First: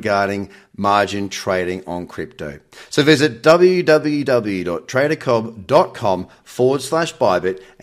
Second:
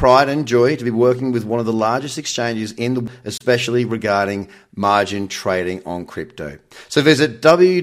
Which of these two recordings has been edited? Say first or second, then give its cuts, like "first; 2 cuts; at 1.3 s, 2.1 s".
second; 1 cut; at 3.1 s